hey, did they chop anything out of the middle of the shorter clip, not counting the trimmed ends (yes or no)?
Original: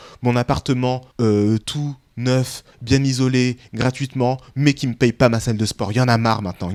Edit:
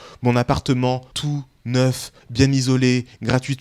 yes